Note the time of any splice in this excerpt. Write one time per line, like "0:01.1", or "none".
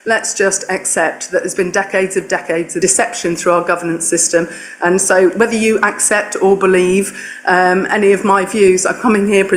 0:02.7